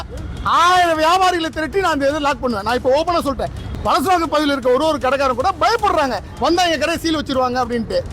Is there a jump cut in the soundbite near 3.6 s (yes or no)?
yes